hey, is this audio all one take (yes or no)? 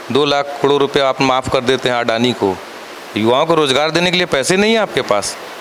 yes